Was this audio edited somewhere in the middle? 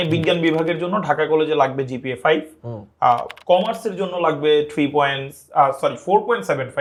no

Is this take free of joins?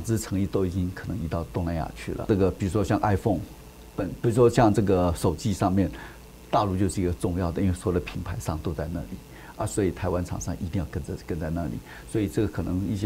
yes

